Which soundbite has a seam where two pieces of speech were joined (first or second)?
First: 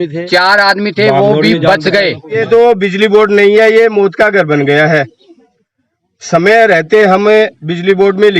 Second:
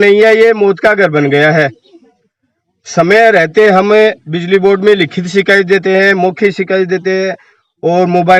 first